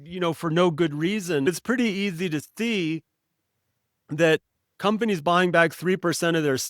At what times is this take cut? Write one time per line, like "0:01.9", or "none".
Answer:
0:01.5